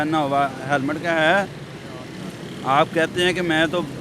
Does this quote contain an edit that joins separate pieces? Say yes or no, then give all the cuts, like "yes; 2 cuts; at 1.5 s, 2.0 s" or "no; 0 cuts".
no; 0 cuts